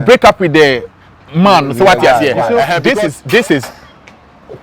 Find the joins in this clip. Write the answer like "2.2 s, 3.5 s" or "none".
2.8 s